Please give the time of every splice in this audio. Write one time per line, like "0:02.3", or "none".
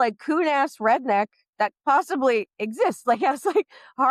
none